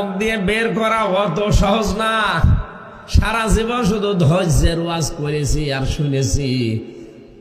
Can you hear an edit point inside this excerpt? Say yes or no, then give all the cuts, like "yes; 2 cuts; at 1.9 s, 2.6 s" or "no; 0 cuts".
no; 0 cuts